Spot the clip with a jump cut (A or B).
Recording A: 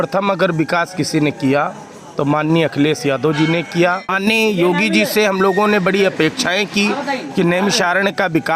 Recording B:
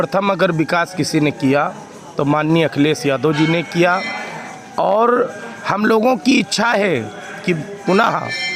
A